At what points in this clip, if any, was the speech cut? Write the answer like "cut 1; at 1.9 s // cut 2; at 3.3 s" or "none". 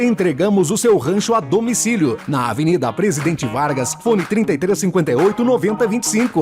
none